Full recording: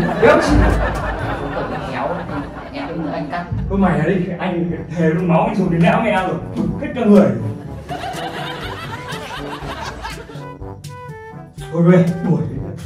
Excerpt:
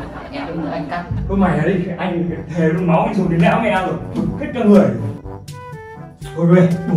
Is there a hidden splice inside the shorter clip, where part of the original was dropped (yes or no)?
yes